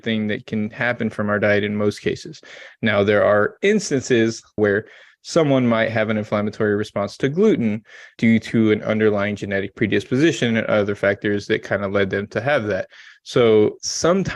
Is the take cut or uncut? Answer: cut